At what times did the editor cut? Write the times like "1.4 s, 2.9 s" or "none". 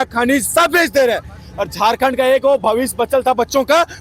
none